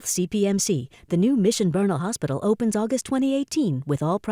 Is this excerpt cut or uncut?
uncut